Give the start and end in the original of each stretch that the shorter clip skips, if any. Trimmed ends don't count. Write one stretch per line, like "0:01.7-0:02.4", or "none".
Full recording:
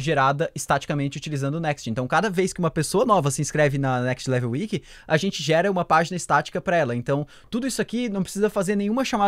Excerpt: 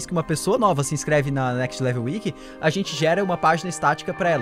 none

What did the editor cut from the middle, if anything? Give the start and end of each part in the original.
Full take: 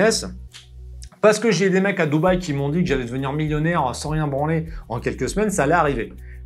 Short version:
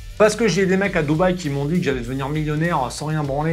none

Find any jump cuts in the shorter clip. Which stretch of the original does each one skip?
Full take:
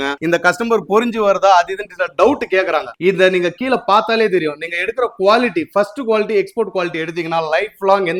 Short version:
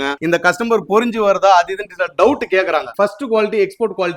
0:02.9-0:05.7

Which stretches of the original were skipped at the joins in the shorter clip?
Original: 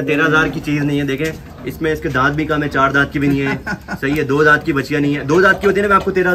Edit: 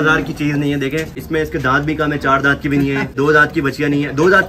0:01.4-0:01.7
0:03.6-0:04.3

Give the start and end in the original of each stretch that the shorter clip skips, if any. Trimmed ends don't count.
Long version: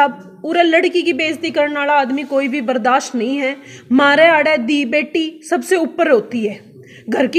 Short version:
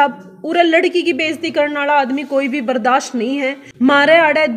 0:03.6-0:03.7

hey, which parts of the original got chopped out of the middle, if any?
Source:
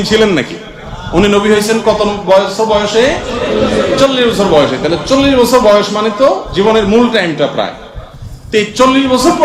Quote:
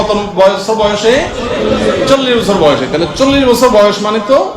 none

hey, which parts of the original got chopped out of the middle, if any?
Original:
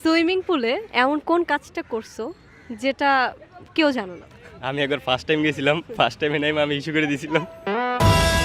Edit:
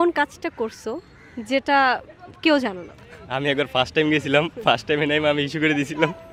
none

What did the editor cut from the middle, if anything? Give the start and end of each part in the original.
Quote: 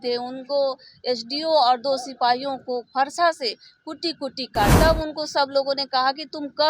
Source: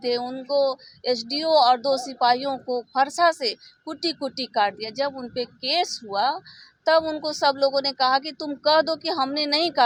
0:04.7-0:06.8

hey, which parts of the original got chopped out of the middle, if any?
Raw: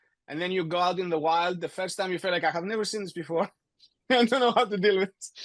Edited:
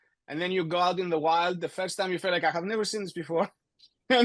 none

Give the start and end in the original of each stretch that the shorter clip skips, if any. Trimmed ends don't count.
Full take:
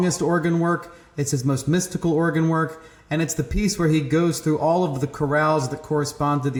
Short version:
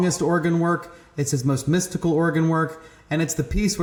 none

